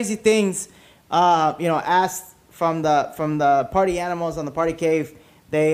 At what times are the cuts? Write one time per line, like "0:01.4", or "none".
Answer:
none